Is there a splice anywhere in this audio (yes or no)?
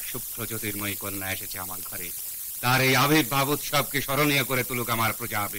no